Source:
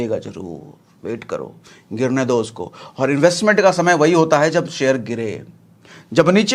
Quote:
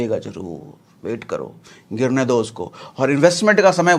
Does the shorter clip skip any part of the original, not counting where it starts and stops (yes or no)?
no